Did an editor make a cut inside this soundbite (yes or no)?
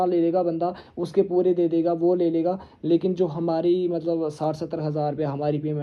no